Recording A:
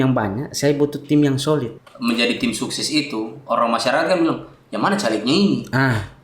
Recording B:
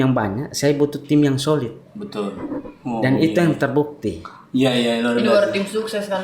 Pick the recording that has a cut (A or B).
A